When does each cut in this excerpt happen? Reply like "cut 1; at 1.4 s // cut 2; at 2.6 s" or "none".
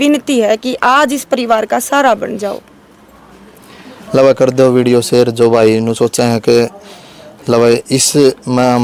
none